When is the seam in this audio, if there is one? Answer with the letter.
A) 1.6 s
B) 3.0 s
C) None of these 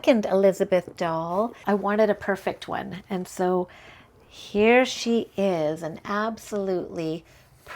A